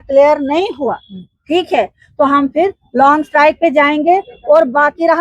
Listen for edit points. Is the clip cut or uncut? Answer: uncut